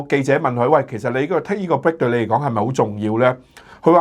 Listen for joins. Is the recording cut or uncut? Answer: uncut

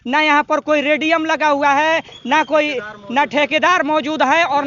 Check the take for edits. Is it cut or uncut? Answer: uncut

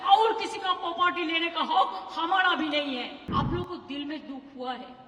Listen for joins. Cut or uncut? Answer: cut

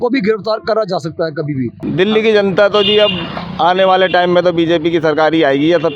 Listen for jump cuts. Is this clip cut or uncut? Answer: cut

